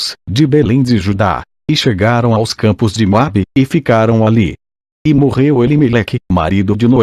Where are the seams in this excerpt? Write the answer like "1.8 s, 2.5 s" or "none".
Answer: 2.9 s